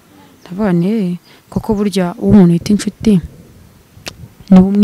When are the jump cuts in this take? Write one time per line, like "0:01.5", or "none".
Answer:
none